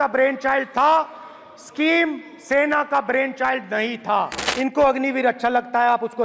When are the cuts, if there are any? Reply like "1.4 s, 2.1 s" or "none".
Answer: 4.4 s